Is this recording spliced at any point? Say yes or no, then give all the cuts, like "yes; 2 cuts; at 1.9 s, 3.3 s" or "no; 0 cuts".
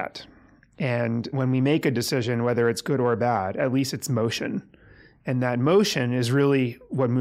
yes; 1 cut; at 1.3 s